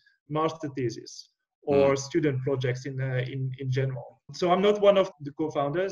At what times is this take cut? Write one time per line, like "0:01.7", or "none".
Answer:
0:04.3
0:05.1